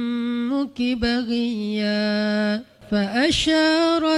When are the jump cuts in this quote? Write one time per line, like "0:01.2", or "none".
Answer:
0:02.7